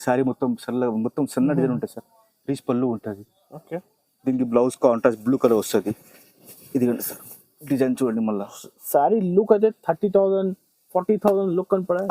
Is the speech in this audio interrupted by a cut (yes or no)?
no